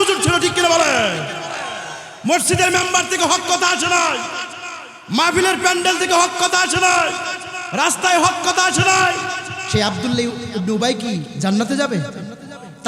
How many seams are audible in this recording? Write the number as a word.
one